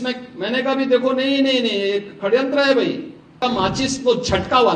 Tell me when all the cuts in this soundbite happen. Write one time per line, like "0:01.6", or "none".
0:03.4